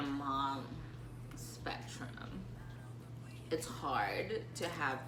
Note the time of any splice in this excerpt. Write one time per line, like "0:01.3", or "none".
none

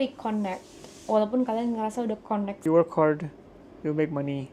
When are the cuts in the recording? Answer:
0:02.6

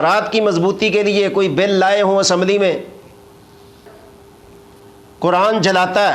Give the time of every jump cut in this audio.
0:03.9

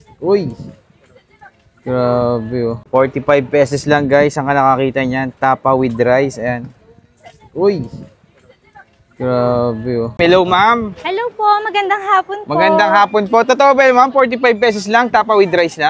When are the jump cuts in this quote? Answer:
0:02.8
0:10.1

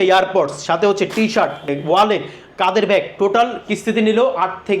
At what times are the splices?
0:01.7

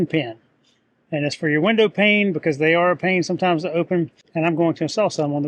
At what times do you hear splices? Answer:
0:04.2

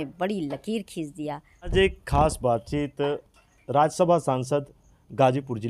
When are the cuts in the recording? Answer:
0:01.7

